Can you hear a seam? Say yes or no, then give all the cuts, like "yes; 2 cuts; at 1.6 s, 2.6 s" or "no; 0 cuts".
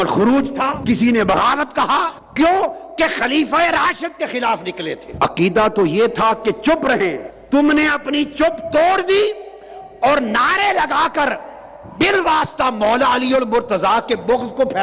yes; 4 cuts; at 0.8 s, 2.2 s, 5.0 s, 7.3 s